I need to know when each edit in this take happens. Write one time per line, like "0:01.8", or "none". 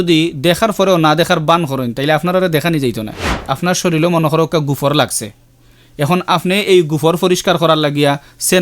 0:03.4